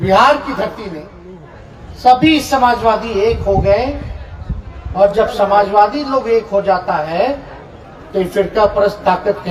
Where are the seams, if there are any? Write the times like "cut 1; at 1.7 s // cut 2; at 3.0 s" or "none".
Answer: none